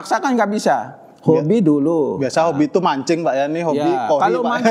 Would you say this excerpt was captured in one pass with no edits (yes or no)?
yes